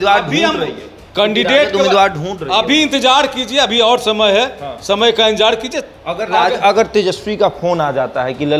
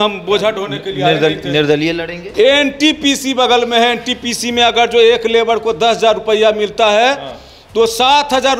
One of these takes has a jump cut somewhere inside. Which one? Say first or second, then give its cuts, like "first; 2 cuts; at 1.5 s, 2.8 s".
second; 1 cut; at 2.2 s